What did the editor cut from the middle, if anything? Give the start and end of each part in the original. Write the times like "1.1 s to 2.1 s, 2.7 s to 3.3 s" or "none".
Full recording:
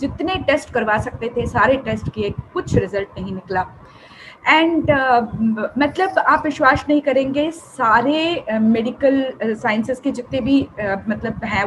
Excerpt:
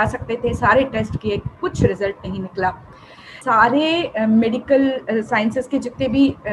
4.3 s to 7.7 s